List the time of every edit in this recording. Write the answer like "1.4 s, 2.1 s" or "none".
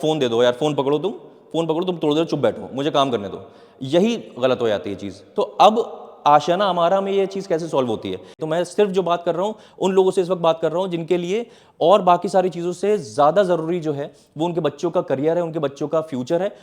8.4 s